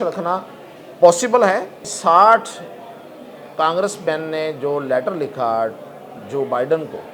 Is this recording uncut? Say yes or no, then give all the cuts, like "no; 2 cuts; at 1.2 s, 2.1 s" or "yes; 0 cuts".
no; 1 cut; at 1.8 s